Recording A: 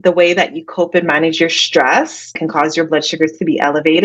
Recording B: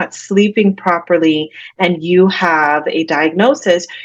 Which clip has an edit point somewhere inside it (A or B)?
A